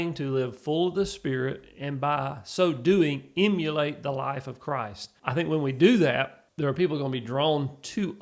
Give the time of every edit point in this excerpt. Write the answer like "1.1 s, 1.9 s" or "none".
5.0 s, 6.4 s